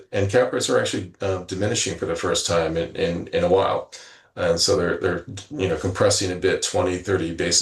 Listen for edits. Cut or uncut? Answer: uncut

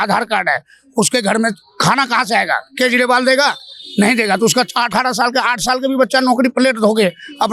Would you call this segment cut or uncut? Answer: uncut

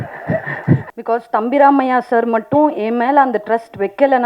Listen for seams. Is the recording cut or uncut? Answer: cut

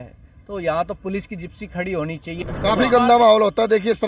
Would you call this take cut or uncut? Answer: cut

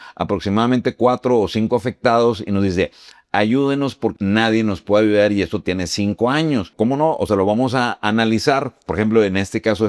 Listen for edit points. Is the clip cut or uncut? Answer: cut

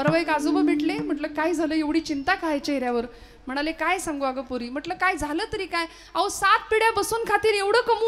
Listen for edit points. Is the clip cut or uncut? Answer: uncut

